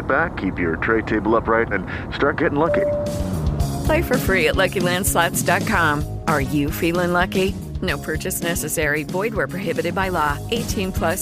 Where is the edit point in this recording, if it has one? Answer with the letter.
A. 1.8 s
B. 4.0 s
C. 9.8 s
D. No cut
D